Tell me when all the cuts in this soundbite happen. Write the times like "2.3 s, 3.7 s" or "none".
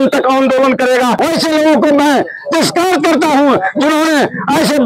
1.2 s